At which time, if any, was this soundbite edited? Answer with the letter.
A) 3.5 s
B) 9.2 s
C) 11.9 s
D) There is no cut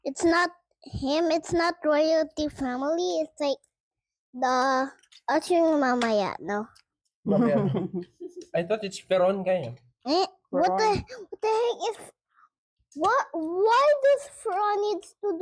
D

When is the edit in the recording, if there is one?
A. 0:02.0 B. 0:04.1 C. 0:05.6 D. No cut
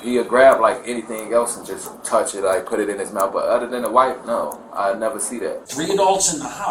C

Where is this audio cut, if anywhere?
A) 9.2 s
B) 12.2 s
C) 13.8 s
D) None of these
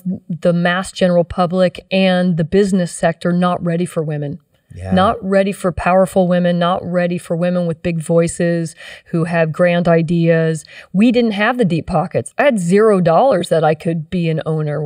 B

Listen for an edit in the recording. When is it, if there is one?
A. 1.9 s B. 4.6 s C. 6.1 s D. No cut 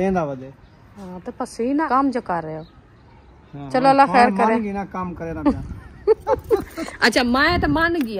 A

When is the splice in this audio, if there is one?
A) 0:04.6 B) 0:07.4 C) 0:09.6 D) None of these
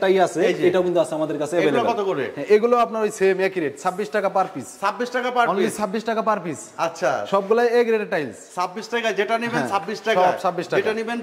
D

